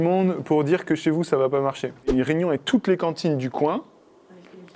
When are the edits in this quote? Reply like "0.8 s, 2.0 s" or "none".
2.1 s